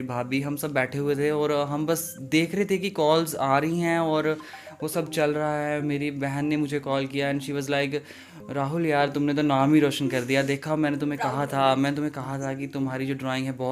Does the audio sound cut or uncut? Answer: uncut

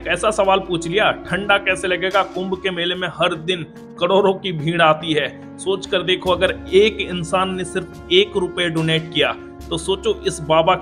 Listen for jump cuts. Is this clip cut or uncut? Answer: uncut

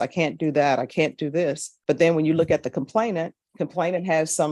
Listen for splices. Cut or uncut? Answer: cut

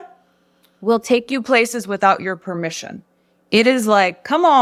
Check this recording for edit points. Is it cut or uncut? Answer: uncut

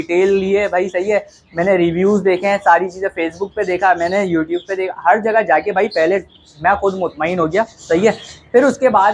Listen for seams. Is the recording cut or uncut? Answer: uncut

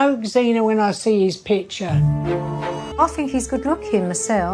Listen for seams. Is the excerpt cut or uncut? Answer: cut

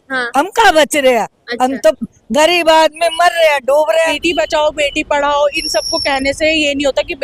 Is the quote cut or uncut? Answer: cut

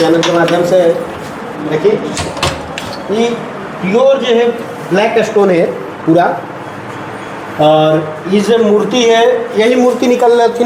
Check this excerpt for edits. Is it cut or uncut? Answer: uncut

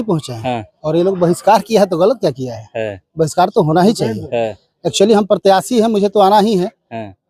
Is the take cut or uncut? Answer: uncut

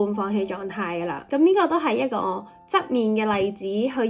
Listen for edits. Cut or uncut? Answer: cut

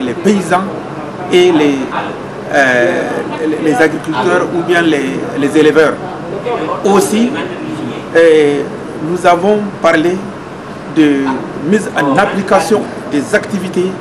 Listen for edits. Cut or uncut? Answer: cut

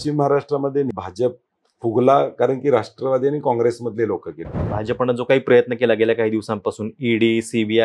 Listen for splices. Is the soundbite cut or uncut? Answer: cut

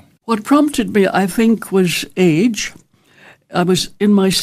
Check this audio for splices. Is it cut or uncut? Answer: uncut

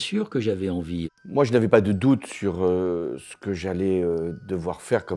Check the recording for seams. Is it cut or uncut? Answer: cut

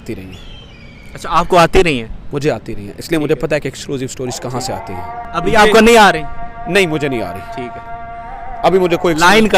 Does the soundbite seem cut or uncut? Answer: cut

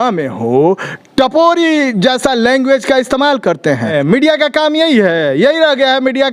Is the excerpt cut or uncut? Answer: cut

